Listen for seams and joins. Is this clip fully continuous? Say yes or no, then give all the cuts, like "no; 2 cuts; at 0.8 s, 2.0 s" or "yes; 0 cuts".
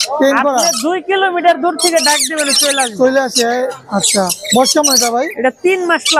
yes; 0 cuts